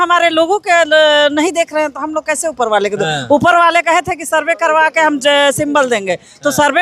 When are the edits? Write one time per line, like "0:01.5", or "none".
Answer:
none